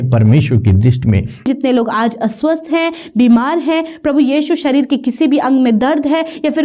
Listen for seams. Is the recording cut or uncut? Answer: cut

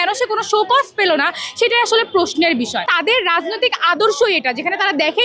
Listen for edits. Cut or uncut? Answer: cut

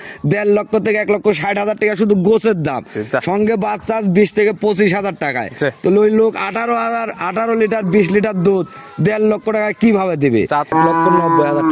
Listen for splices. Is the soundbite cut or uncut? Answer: cut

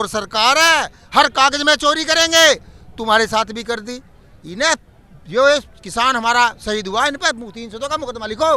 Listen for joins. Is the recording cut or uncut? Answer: uncut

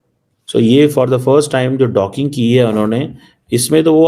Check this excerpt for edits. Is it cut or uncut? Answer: uncut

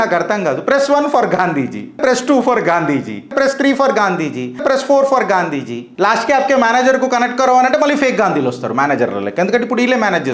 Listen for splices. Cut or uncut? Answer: cut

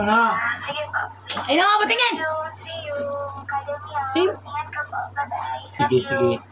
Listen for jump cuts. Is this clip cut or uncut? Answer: uncut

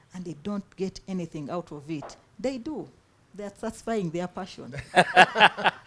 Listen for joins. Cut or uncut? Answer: uncut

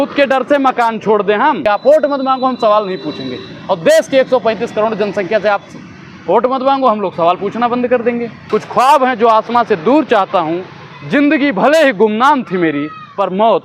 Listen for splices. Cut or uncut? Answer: cut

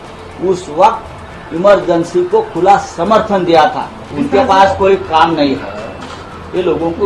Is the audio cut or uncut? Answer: cut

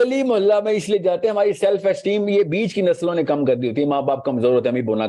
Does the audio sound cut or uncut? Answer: uncut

